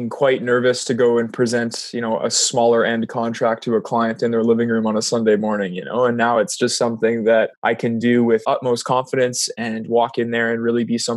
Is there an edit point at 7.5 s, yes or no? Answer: yes